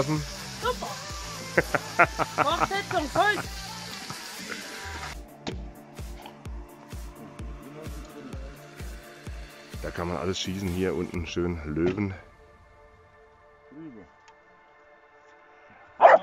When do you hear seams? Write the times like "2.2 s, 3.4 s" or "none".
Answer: 5.1 s